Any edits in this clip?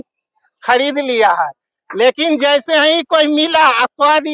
no; 0 cuts

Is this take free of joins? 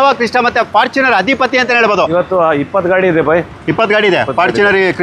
no; 1 cut; at 2.1 s

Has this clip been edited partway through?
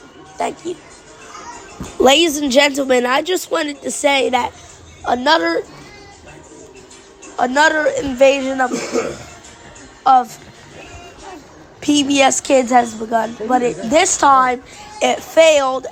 no; 0 cuts

